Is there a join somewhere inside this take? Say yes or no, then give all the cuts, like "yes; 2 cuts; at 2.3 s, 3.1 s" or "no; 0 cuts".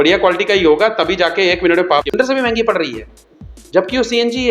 yes; 1 cut; at 2.0 s